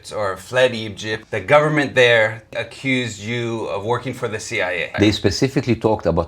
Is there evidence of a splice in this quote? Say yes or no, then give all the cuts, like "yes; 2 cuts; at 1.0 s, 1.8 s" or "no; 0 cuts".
yes; 3 cuts; at 1.1 s, 2.5 s, 4.9 s